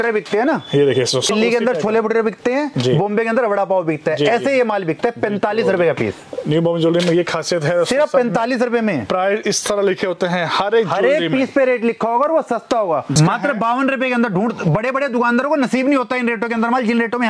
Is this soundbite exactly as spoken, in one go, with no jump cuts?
no; 2 cuts; at 1.3 s, 13.2 s

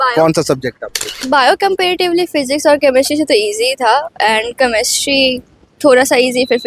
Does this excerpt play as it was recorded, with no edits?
yes; 0 cuts

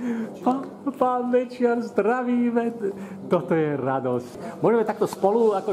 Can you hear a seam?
yes; 1 cut; at 4.3 s

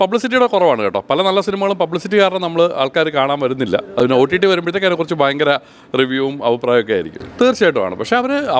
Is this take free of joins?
yes; 0 cuts

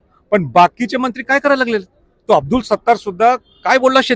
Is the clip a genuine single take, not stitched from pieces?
yes; 0 cuts

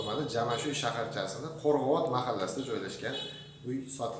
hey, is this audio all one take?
yes; 0 cuts

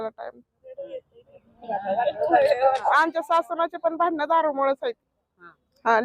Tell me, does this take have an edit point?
yes; 1 cut; at 2.9 s

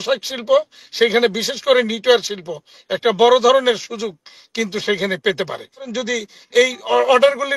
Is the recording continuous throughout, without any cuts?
no; 1 cut; at 6.0 s

